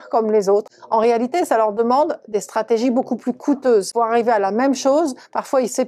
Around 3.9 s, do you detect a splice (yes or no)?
yes